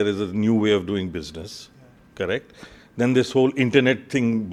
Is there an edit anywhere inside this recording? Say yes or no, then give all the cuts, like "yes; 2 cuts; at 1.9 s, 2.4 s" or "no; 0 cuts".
no; 0 cuts